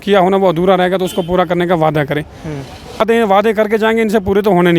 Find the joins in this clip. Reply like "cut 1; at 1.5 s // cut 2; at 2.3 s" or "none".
cut 1; at 3.0 s

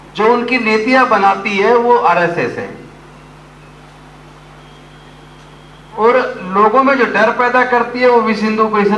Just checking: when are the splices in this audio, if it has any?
none

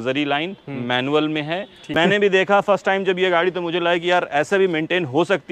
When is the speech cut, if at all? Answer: cut 1; at 1.8 s

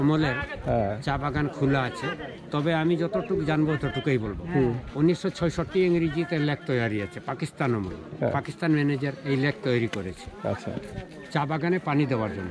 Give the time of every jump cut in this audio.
none

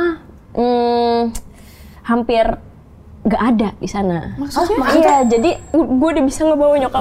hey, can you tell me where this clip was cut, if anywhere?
cut 1; at 5.6 s

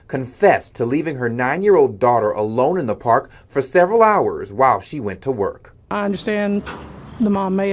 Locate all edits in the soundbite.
cut 1; at 5.2 s

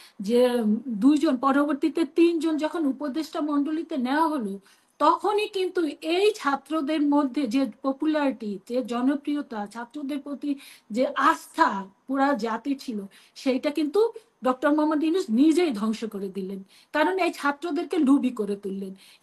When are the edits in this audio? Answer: none

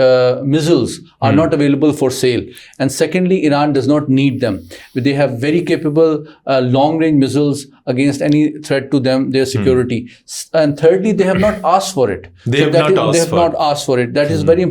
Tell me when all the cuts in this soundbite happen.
none

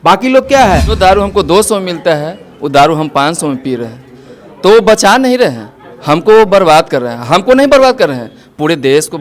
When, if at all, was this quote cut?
cut 1; at 1.0 s

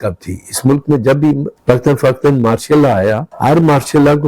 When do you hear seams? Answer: cut 1; at 1.5 s // cut 2; at 3.3 s

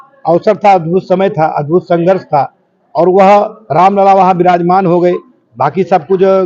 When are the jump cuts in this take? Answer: none

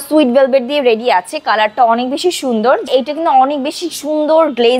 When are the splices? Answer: cut 1; at 2.9 s

